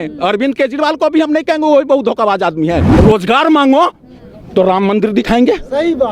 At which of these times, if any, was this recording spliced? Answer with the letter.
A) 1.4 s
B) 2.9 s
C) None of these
B